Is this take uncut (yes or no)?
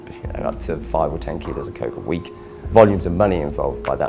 yes